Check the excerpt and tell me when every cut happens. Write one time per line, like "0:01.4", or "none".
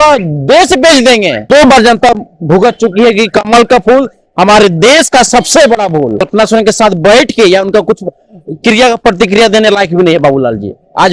0:01.4
0:06.3